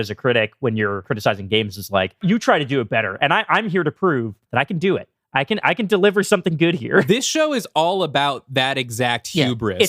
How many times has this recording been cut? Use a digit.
3